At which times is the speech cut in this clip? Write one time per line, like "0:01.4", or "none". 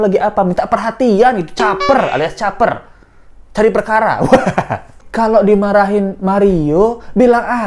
0:05.0